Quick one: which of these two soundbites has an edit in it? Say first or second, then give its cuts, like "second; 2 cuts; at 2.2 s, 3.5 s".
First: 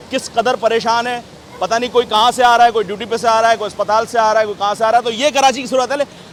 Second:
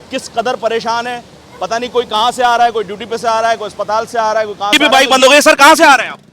second; 1 cut; at 4.8 s